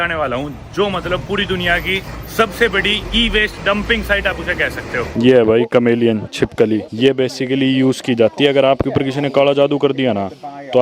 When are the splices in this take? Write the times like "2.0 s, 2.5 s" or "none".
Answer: 5.1 s, 6.9 s